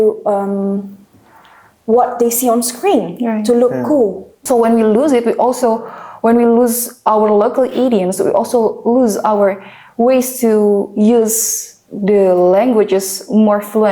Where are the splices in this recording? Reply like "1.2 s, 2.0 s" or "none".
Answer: 4.3 s